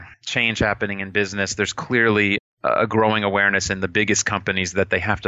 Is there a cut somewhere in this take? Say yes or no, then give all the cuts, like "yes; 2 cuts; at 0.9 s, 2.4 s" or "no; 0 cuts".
no; 0 cuts